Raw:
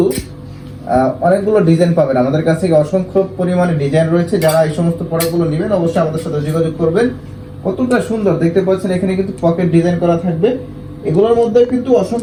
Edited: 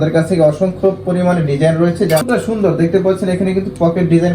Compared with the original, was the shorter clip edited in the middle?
yes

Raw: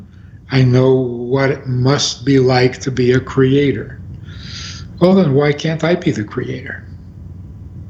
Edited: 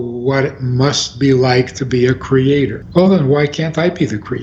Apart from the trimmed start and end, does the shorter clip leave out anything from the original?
yes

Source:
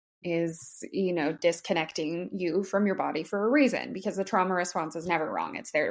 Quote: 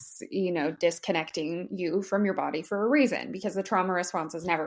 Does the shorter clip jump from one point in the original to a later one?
no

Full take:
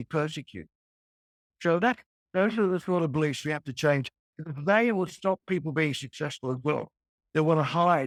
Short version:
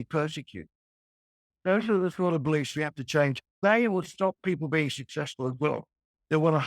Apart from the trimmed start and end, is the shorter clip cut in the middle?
yes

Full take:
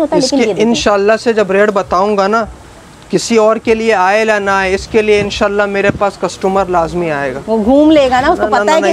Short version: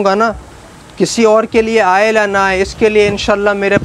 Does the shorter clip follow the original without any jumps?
yes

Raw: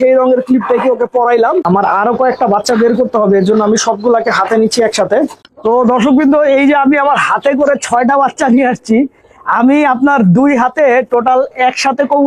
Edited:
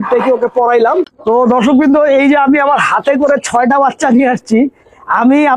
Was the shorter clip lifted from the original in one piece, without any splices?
no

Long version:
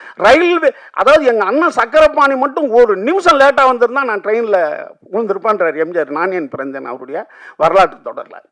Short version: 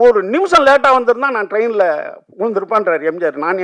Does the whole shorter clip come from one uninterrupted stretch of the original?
yes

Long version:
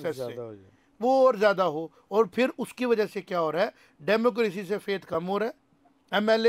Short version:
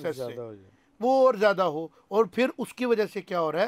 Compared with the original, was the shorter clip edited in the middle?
no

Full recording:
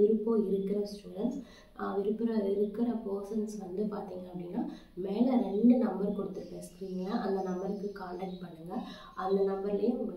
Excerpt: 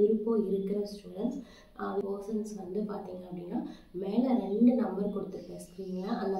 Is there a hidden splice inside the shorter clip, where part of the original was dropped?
yes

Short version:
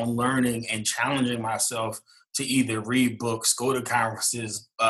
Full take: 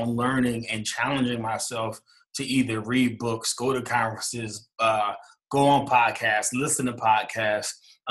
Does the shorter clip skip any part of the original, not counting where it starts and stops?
no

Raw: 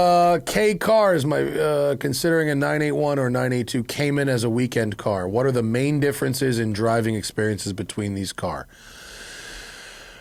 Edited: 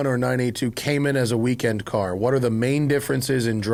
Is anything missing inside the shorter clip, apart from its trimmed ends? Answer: no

